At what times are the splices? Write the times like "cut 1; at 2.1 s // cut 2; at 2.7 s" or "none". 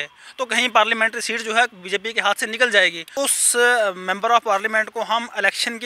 cut 1; at 3.1 s